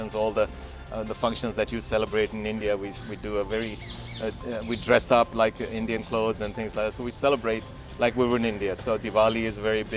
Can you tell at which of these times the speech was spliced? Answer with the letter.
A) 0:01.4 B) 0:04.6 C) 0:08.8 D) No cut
D